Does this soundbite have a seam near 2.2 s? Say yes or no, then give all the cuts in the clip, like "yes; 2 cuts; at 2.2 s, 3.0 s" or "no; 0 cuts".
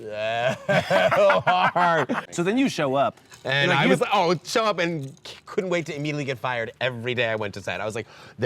yes; 1 cut; at 2.2 s